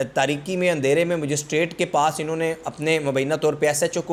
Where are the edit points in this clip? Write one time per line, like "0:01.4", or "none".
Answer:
none